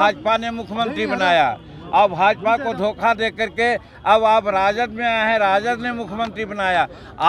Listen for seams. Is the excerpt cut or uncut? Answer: uncut